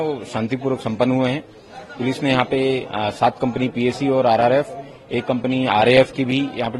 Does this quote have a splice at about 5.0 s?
no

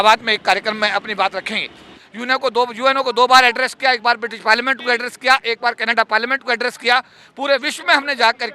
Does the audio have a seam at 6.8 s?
no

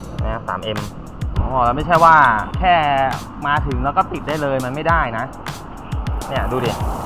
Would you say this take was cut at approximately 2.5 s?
yes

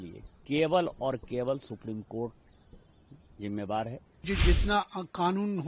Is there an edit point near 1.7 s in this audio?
no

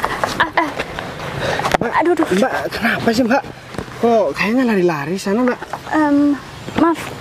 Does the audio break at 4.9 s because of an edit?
no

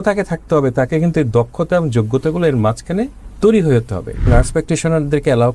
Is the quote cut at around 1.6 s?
no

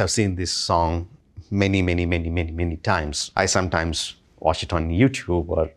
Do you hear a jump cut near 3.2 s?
yes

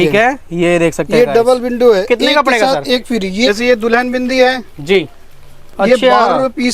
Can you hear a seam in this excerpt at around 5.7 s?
no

